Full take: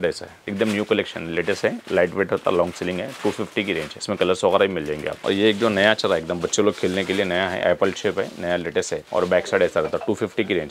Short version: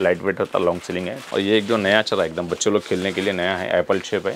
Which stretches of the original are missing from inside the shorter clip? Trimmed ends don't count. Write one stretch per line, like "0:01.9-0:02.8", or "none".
0:03.1-0:05.1